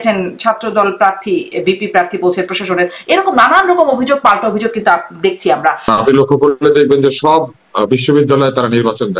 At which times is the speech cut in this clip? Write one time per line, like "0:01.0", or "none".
0:05.9